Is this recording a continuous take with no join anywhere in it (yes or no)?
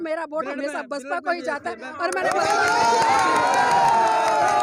yes